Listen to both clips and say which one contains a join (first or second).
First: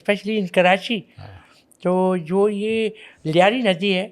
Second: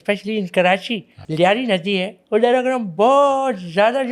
second